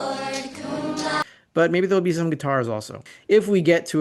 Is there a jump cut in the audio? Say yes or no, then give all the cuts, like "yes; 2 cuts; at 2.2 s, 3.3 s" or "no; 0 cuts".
yes; 1 cut; at 3.1 s